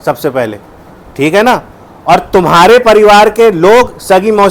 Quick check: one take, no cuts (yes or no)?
yes